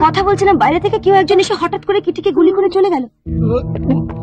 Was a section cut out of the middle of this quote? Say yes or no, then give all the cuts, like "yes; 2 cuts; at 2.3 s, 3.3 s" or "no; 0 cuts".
no; 0 cuts